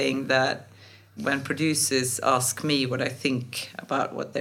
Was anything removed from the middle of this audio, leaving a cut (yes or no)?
yes